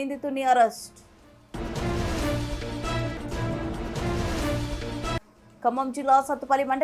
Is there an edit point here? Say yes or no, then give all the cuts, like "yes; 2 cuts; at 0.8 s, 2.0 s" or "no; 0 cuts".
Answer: no; 0 cuts